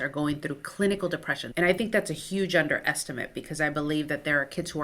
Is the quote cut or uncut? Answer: cut